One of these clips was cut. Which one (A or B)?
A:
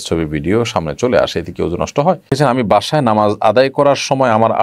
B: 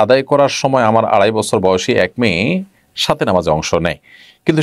A